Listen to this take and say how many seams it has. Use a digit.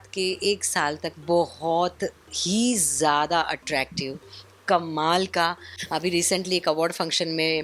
1